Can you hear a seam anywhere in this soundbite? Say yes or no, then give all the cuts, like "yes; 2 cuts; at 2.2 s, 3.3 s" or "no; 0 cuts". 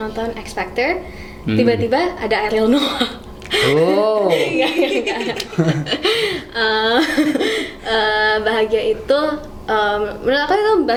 no; 0 cuts